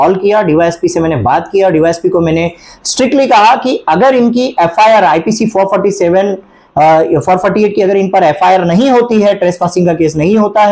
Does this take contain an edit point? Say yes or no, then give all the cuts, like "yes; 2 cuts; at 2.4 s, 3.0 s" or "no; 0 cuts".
no; 0 cuts